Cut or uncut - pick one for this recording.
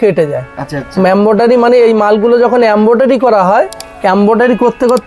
uncut